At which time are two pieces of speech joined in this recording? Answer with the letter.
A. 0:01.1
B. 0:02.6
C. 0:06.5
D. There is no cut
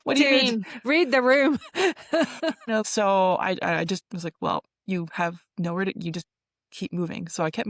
B